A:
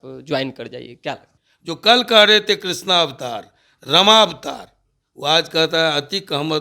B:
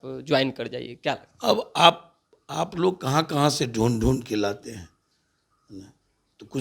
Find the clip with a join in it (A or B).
A